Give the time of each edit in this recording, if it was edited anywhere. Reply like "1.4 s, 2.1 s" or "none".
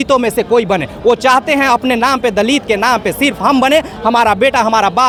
none